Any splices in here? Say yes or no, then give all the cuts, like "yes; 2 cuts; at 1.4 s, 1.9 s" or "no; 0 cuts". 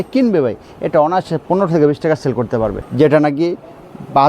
yes; 1 cut; at 2.8 s